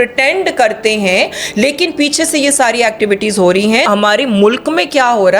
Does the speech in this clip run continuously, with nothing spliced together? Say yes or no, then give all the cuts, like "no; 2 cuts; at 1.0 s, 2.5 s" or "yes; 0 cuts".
no; 1 cut; at 3.9 s